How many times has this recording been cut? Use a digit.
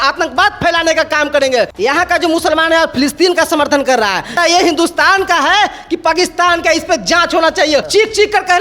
3